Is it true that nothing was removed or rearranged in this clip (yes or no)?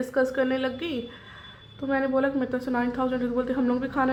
yes